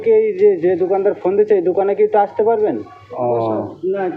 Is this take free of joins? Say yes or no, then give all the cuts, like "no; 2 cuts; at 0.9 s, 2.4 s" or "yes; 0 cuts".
no; 1 cut; at 3.0 s